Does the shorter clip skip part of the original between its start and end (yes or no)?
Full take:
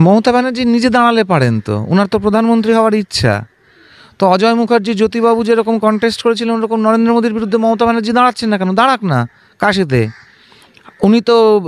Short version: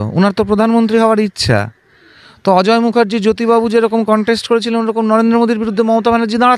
no